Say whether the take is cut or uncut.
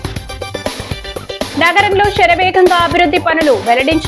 uncut